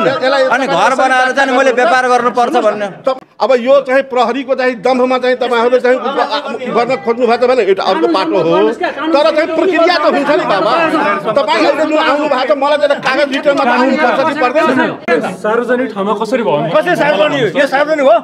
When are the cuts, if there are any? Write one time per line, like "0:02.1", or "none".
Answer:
0:03.2
0:15.1